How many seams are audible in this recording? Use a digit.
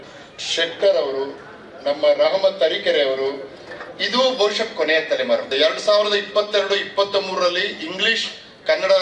1